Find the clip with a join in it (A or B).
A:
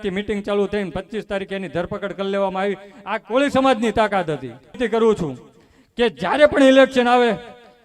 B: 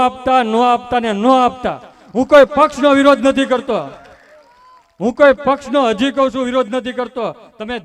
A